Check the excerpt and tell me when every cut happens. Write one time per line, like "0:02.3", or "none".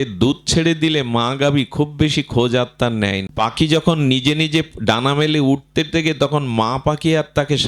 0:03.3